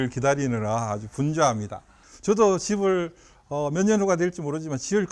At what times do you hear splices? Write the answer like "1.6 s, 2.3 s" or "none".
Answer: 2.2 s